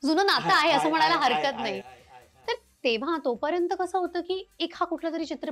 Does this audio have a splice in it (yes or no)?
no